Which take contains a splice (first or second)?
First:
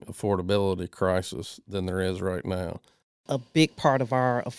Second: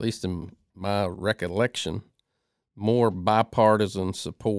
first